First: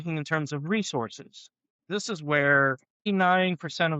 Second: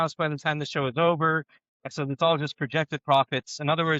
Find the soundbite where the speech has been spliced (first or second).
first